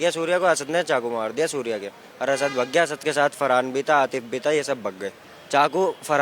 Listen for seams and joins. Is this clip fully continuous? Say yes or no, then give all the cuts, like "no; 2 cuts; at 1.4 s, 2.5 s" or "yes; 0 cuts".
no; 1 cut; at 5.3 s